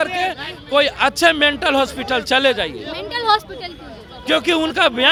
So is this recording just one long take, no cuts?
yes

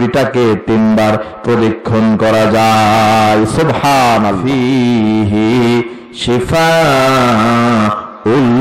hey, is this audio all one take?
no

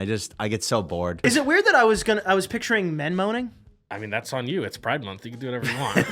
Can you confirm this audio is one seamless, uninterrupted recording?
no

